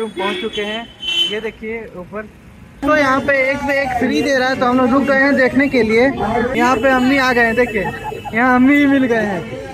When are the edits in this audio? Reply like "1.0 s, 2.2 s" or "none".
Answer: 2.8 s, 6.5 s